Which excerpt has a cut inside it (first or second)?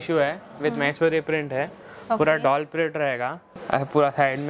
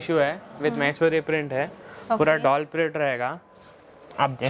first